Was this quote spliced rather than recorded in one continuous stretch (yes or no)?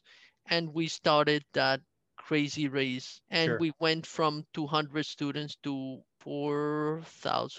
yes